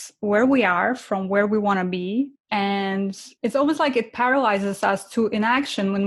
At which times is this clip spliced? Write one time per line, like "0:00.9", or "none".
0:02.4
0:03.2